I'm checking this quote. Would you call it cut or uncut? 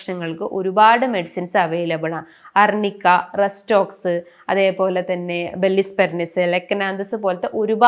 uncut